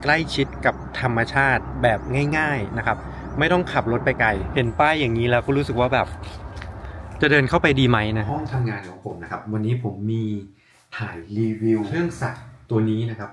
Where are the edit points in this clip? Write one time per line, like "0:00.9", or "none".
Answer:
0:04.5
0:08.3
0:11.9

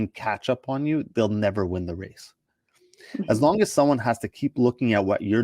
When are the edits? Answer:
none

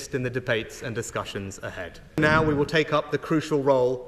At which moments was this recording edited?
0:02.2

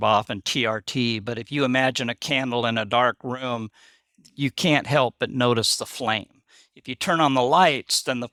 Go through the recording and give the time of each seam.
none

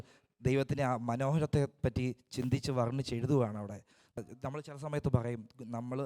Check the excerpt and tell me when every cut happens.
0:04.2

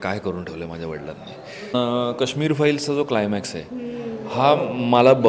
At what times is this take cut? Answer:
0:01.7

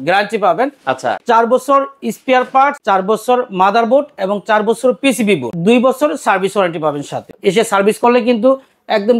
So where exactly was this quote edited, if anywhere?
0:01.2
0:02.8
0:05.5
0:07.3

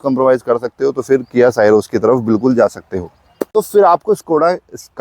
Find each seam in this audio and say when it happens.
0:03.5

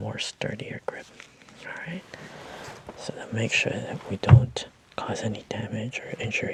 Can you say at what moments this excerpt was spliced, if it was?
none

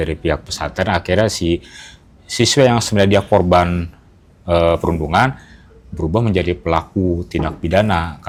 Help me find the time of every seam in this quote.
none

